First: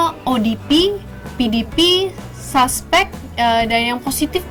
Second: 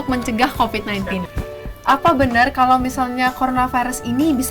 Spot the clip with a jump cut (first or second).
second